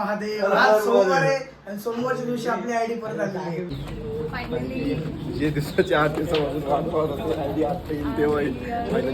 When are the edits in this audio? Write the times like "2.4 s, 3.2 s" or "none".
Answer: 3.7 s

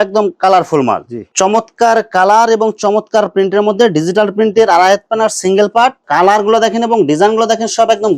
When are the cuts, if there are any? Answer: 1.2 s, 6.0 s

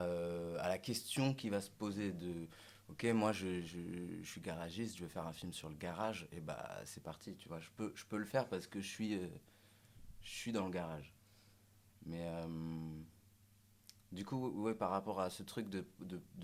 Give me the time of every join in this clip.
none

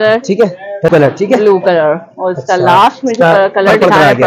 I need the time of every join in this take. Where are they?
0.9 s

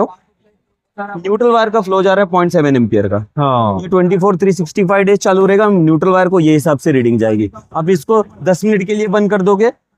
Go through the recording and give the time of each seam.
none

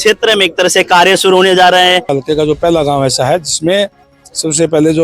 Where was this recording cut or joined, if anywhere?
2.1 s

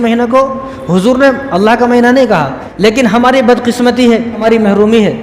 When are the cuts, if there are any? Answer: 2.6 s, 4.4 s

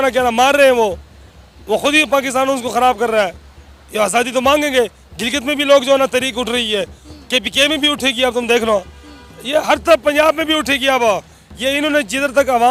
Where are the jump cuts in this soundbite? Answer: none

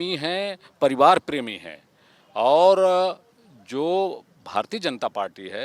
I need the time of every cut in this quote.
none

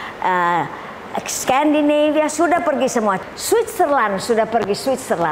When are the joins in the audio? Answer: 3.3 s

